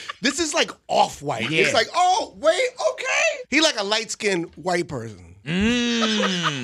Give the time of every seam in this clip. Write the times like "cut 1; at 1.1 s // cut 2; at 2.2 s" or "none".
cut 1; at 3.4 s